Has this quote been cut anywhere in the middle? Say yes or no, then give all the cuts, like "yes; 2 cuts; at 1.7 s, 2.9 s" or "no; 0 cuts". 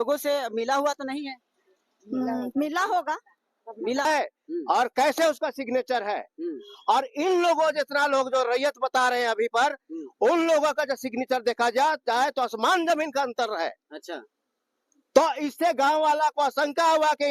yes; 1 cut; at 4.1 s